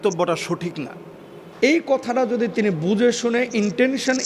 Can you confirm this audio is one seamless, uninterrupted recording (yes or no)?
no